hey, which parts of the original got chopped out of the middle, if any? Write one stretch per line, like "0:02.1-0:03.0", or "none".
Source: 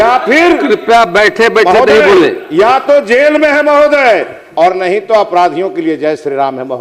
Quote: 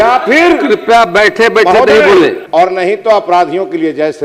0:02.4-0:04.4

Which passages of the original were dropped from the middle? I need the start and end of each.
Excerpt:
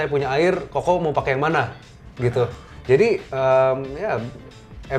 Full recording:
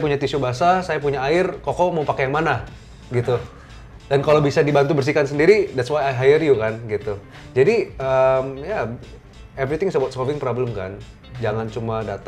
0:03.6-0:07.3

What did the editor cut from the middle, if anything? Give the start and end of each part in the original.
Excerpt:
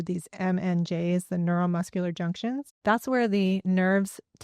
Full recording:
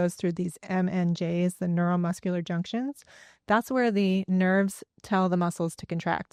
0:03.0-0:03.3

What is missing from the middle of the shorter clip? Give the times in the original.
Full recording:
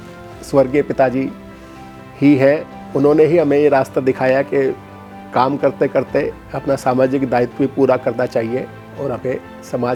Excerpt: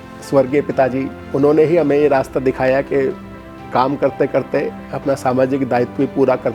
0:01.4-0:02.8

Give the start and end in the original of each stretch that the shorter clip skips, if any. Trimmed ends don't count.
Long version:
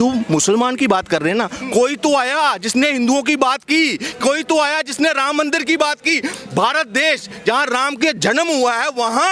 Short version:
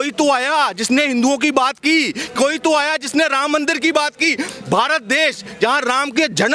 none

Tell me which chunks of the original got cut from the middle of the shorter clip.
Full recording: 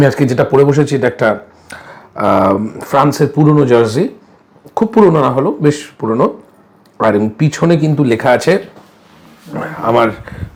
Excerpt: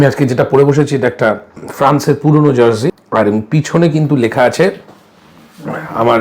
0:01.6-0:02.8
0:04.1-0:06.9

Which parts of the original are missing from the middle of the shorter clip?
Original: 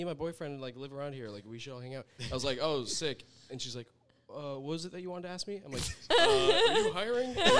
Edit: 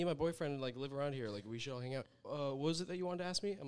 0:02.1-0:04.2

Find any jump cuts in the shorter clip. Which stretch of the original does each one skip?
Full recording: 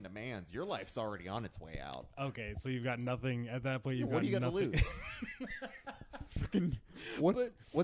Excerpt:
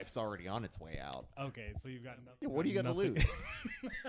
0:03.1-0:03.9

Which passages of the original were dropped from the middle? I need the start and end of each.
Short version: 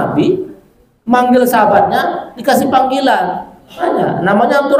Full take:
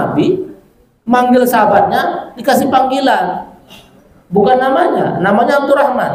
0:03.8-0:04.8

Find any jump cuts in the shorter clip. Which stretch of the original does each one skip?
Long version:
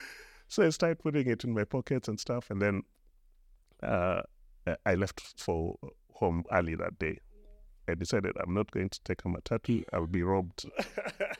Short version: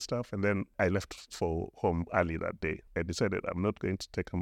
0:02.9-0:04.8
0:05.8-0:06.1
0:07.2-0:07.7

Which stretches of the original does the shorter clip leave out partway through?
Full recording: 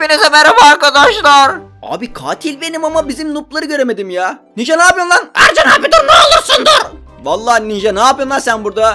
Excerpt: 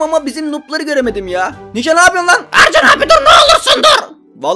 none

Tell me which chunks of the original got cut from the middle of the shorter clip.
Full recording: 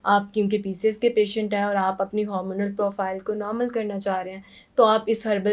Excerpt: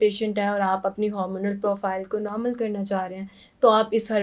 none

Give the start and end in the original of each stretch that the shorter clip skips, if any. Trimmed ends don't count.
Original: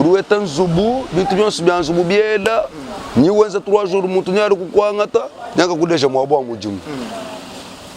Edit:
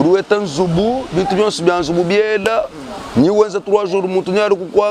none

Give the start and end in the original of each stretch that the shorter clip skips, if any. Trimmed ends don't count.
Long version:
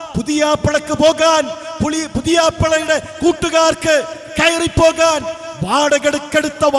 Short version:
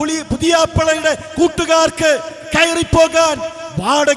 none

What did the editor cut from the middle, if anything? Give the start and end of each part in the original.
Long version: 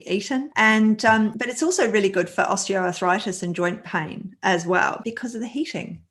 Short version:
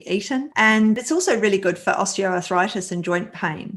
0:01.0-0:01.5

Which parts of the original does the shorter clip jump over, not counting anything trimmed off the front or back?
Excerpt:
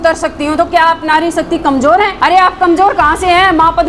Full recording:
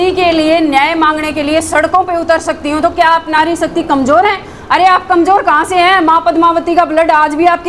0:04.4-0:04.6

